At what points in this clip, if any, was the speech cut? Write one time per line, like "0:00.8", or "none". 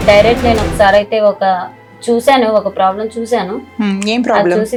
none